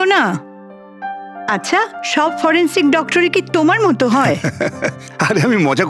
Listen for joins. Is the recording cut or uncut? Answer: cut